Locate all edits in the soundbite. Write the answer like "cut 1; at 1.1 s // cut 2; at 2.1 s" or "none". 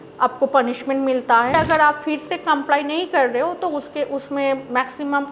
cut 1; at 1.5 s